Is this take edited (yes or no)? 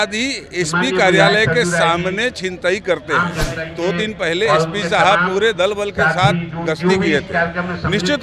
yes